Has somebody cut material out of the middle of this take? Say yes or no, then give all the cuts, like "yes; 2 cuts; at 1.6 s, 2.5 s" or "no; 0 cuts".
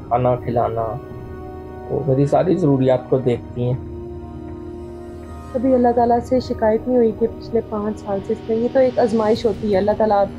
no; 0 cuts